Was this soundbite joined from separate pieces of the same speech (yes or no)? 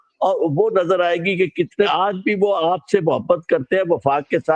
yes